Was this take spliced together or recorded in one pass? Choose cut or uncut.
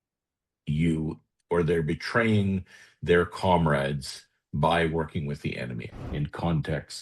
cut